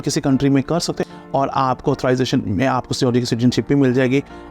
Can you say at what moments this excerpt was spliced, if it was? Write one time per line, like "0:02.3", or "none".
0:01.1